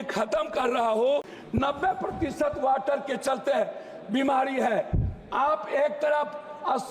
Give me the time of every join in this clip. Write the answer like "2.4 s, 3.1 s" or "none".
1.4 s

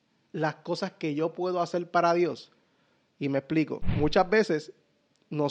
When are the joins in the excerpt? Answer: 3.9 s

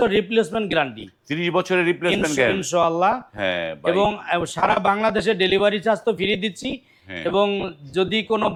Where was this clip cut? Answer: none

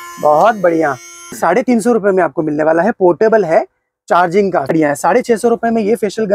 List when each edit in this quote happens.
1.4 s, 4.7 s

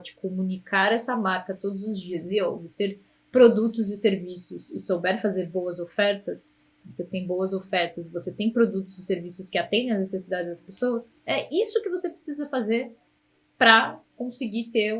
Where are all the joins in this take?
11.2 s

